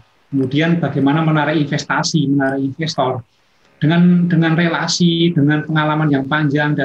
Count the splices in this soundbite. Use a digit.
0